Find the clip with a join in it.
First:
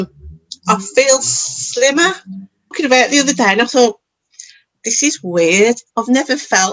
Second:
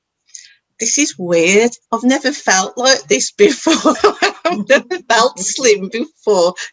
first; 1 cut; at 2.8 s

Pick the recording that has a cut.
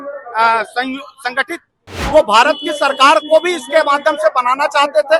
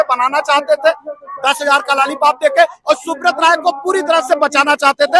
first; 1 cut; at 1.9 s

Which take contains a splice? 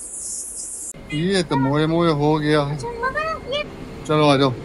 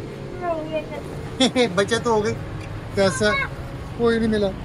first; 2 cuts; at 1.0 s, 3.6 s

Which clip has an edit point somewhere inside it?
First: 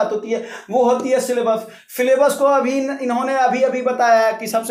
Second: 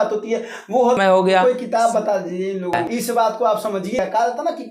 second; 3 cuts; at 1.0 s, 2.8 s, 4.0 s

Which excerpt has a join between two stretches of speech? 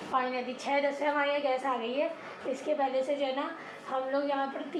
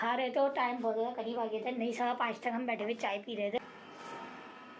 second; 1 cut; at 3.6 s

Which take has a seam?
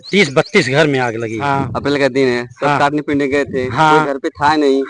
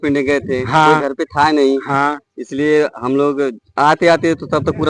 first; 1 cut; at 1.4 s

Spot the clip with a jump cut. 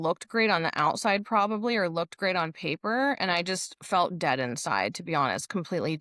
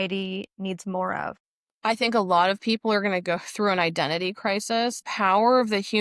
second; 2 cuts; at 1.5 s, 5.1 s

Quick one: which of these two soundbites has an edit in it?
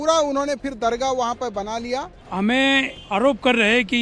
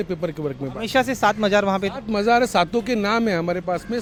first; 2 cuts; at 2.2 s, 3.0 s

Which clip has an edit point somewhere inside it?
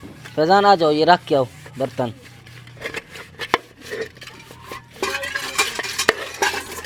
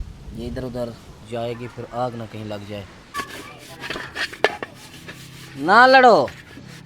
second; 1 cut; at 3.1 s

